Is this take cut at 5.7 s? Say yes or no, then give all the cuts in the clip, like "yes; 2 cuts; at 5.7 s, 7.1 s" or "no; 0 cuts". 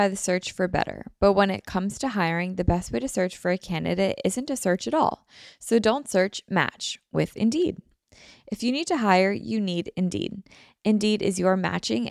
no; 0 cuts